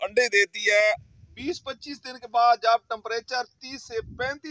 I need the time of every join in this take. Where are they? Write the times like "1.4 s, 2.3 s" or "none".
1.0 s